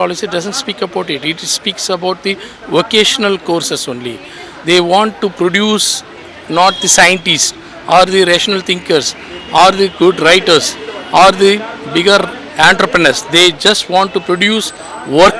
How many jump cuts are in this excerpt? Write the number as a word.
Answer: zero